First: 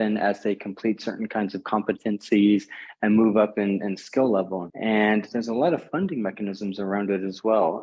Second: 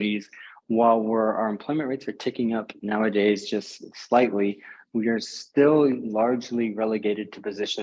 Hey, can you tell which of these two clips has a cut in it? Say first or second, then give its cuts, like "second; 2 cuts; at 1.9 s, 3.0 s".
first; 1 cut; at 4.6 s